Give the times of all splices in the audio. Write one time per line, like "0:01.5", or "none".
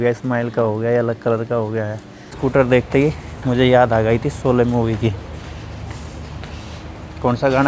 0:02.4